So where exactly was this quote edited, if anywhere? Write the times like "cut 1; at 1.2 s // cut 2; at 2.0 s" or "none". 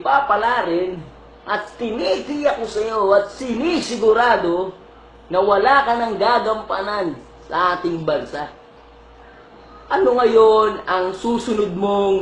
cut 1; at 7.4 s